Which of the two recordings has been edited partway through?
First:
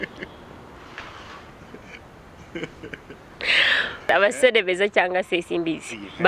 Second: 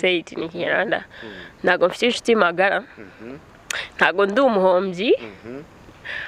first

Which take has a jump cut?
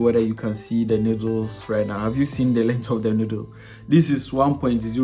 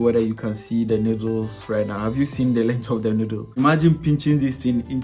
second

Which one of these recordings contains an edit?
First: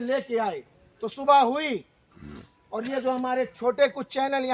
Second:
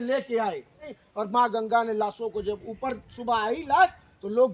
second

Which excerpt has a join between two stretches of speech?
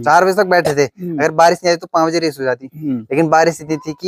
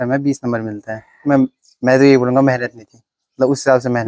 second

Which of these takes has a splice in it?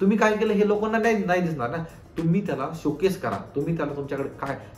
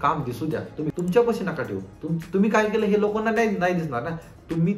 second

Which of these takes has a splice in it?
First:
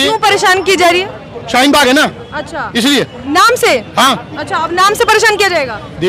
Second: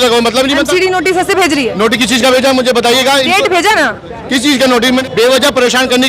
second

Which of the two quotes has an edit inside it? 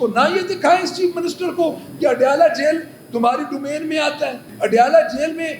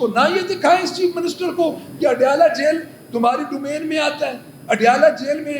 first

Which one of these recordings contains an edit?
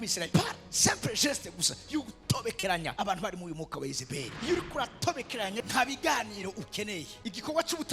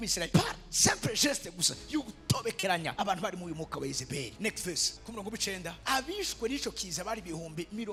first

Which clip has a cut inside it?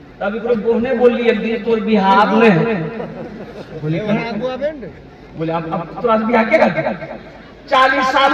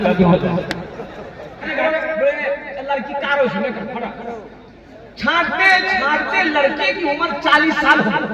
second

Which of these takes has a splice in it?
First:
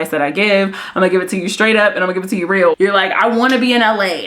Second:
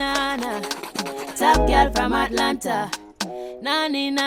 first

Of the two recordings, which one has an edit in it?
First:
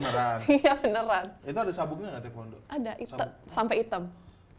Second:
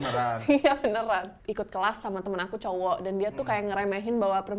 second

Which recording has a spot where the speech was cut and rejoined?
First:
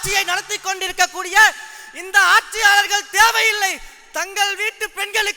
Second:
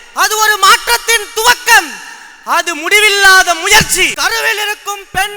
second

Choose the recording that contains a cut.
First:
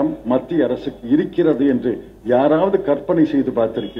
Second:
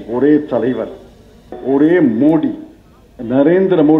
second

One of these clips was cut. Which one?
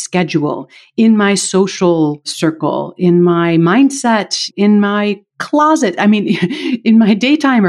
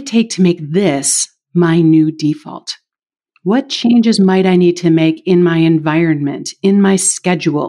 first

